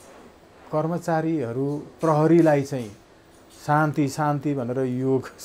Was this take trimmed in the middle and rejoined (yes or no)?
no